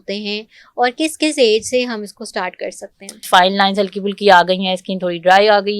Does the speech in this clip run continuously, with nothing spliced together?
no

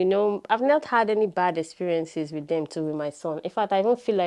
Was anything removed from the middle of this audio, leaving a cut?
no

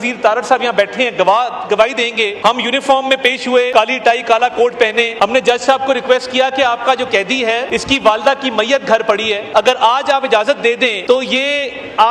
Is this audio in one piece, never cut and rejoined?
no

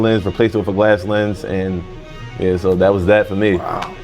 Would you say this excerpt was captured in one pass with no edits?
yes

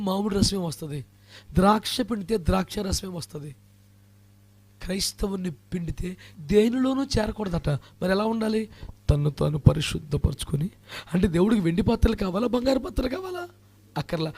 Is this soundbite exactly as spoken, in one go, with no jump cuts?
no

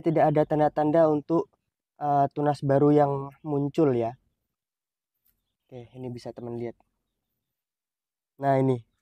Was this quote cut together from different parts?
no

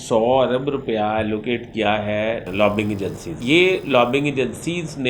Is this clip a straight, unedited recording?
no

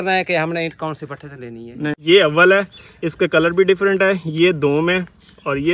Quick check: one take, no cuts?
no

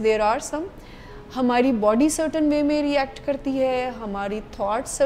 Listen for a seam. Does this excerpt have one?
no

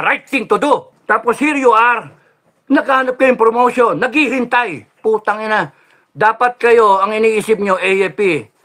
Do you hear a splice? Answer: yes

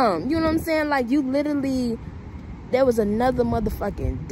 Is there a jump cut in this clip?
no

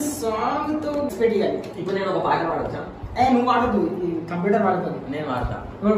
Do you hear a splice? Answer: yes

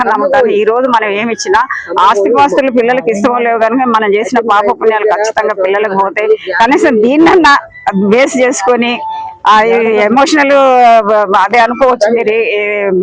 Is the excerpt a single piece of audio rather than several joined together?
yes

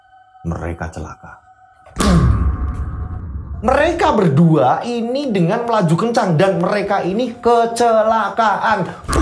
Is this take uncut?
no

